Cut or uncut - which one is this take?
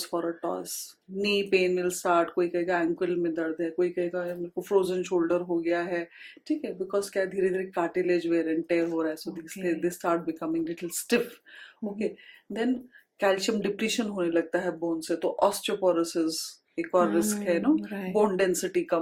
uncut